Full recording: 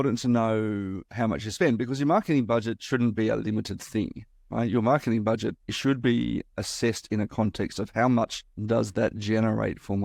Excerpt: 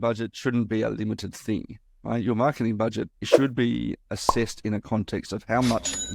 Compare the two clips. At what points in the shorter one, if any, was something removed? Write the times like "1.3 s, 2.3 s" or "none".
none